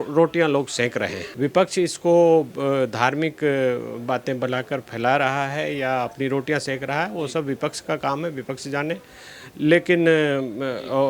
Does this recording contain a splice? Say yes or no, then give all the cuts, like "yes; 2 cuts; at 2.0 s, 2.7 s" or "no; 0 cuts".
yes; 1 cut; at 1.2 s